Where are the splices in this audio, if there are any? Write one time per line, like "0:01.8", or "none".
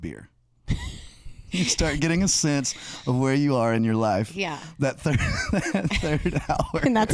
0:01.5